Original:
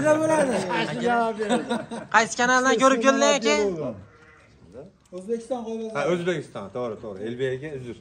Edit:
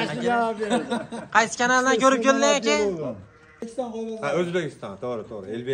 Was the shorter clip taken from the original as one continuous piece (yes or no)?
no